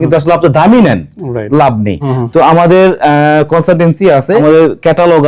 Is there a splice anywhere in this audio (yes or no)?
yes